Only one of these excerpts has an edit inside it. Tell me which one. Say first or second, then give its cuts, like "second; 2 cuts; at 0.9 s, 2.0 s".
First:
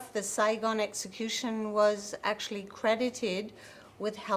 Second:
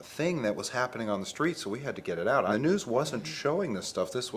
second; 1 cut; at 2.5 s